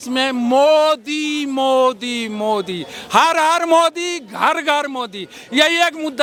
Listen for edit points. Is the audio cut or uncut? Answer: uncut